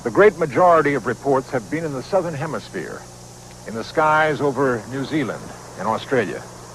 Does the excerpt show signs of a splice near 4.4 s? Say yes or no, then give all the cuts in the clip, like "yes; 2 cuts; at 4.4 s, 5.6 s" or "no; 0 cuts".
no; 1 cut; at 2.7 s